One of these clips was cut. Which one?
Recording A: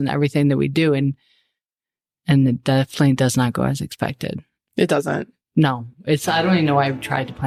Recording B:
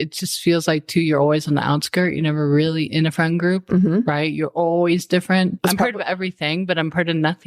B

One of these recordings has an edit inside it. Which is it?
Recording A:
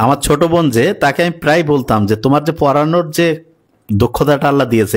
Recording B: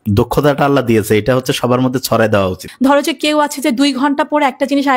B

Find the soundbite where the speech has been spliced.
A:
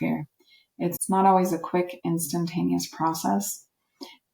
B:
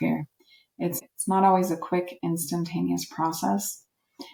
A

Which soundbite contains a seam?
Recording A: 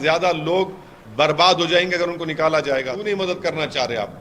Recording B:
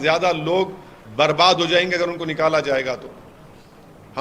A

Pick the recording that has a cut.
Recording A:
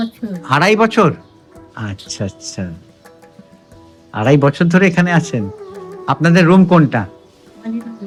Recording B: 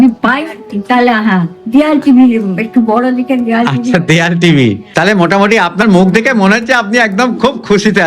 B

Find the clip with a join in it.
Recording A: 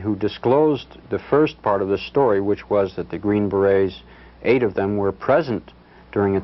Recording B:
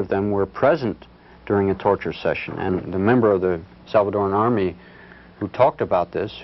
B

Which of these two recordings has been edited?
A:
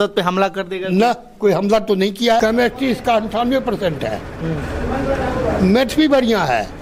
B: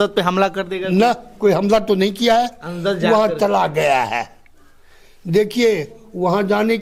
A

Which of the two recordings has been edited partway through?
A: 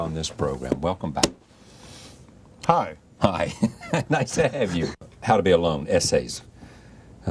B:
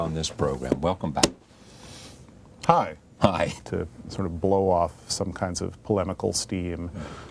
A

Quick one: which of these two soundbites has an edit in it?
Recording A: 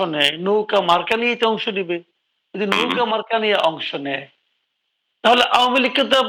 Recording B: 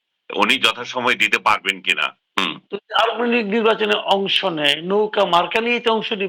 B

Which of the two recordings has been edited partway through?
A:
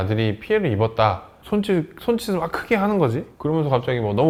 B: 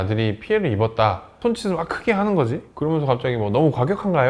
B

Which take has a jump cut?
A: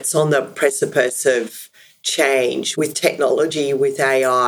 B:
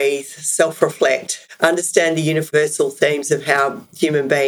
A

